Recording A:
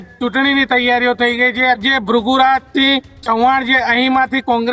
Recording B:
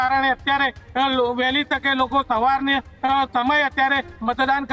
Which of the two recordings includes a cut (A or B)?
A